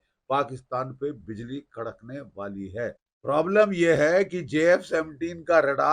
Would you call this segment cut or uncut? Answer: cut